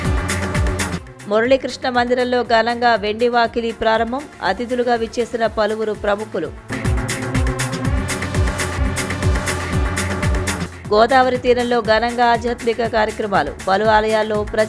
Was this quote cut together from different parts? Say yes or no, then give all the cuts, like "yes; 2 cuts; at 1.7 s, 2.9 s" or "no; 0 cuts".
yes; 1 cut; at 0.9 s